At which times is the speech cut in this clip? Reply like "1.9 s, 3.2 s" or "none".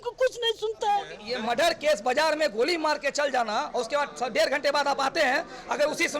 1.2 s